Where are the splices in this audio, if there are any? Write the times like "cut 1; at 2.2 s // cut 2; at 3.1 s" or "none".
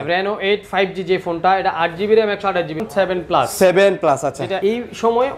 cut 1; at 2.8 s // cut 2; at 4.6 s